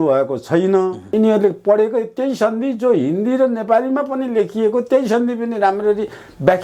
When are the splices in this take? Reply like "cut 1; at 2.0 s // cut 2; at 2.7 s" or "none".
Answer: cut 1; at 1.1 s